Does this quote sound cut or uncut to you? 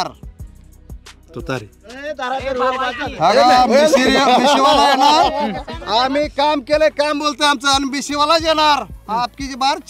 uncut